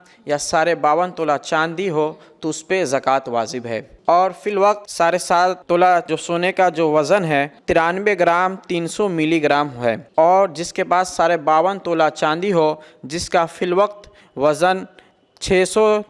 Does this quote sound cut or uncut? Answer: uncut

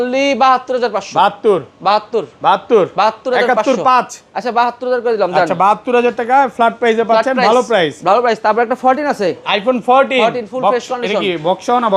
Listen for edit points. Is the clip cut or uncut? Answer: uncut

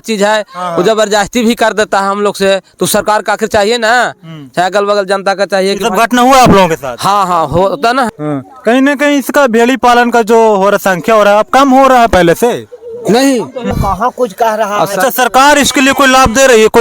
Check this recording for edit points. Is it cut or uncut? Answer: cut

